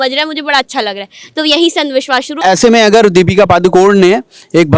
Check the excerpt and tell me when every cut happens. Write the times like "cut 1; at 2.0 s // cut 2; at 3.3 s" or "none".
cut 1; at 2.4 s